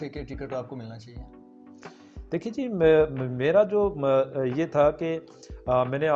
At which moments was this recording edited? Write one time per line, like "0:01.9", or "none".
none